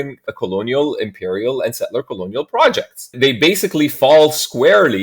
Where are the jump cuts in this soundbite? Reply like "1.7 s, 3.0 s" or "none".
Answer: 3.0 s

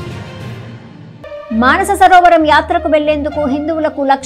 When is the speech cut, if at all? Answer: 1.2 s

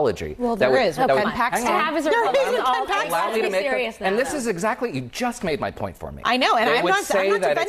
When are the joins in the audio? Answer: none

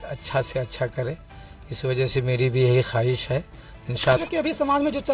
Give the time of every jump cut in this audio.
4.2 s

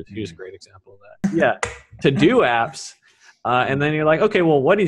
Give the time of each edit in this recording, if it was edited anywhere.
1.1 s

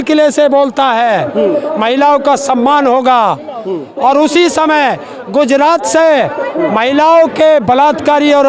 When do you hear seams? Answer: none

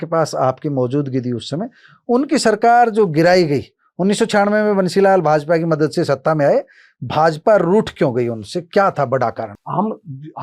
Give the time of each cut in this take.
9.5 s

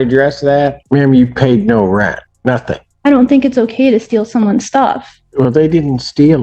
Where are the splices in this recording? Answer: 0.8 s, 2.6 s, 5.1 s

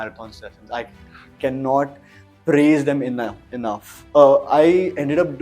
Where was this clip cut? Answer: 3.9 s

